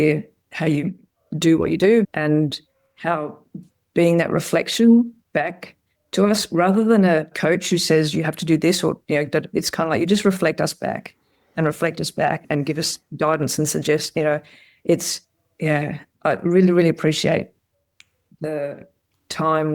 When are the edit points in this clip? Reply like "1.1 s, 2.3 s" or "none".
2.1 s, 7.3 s, 12.4 s